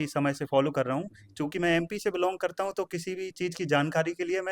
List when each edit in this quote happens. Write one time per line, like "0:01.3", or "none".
none